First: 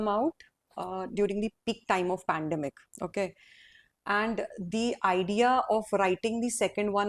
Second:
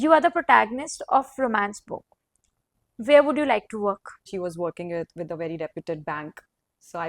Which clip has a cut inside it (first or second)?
second